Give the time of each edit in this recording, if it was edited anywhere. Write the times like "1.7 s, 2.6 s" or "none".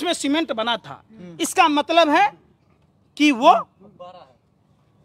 none